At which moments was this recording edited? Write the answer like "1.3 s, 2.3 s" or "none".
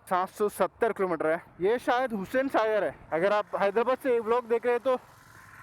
1.4 s, 3.0 s